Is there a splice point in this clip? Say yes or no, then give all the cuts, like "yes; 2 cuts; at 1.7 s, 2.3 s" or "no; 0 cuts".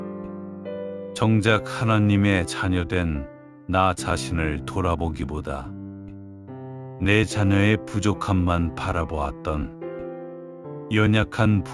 yes; 1 cut; at 1.0 s